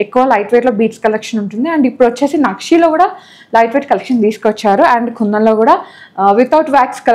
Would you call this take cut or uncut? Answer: uncut